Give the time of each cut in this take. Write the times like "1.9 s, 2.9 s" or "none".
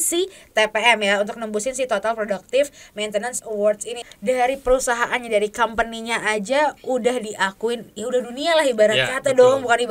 4.1 s